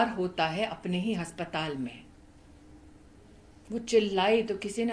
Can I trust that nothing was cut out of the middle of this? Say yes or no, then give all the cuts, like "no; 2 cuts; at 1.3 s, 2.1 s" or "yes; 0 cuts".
yes; 0 cuts